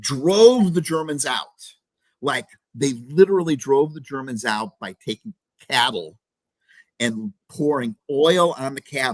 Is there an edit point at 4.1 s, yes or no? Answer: no